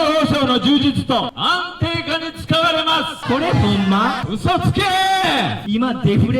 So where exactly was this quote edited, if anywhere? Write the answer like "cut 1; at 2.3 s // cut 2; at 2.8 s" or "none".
cut 1; at 1.4 s // cut 2; at 3.2 s // cut 3; at 4.3 s // cut 4; at 5.6 s

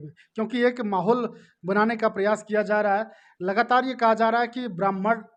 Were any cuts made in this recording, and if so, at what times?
none

